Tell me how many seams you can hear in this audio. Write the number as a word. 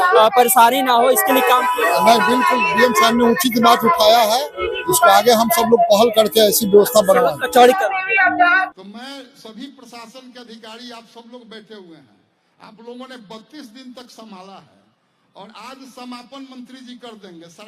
one